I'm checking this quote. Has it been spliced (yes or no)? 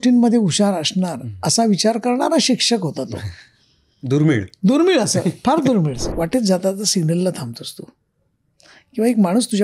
yes